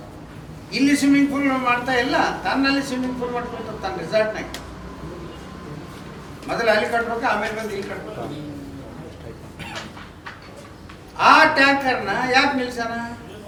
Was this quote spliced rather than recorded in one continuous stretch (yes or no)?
no